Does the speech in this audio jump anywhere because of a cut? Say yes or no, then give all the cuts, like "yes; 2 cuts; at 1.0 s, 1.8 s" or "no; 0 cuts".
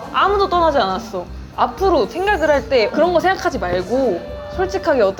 no; 0 cuts